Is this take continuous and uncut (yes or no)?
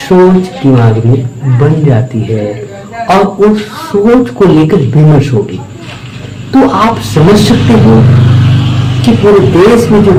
yes